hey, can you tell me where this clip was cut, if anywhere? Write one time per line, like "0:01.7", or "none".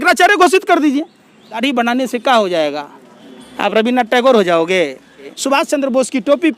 0:01.6
0:05.3